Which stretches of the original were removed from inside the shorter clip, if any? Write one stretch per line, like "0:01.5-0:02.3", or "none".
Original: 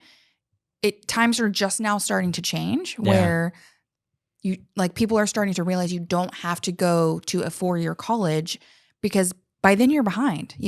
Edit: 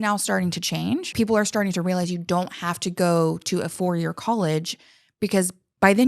0:02.9-0:04.9